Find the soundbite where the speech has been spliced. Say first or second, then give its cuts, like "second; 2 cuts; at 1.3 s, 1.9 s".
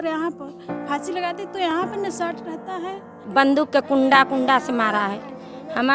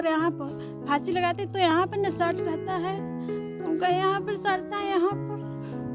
first; 1 cut; at 3.2 s